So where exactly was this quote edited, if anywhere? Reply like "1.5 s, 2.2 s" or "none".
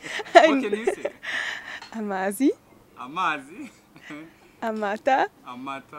none

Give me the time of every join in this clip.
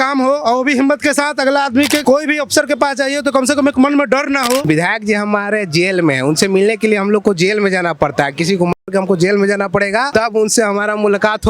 2.0 s, 4.6 s, 10.1 s

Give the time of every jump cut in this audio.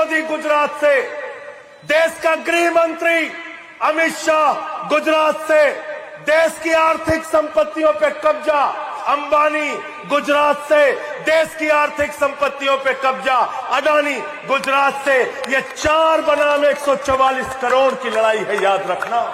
11.6 s

